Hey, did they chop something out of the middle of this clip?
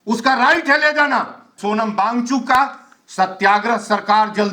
yes; 1 cut; at 1.5 s

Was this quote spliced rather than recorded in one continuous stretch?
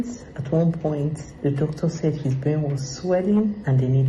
no; 0 cuts

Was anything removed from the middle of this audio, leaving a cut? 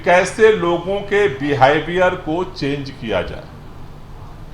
no; 0 cuts

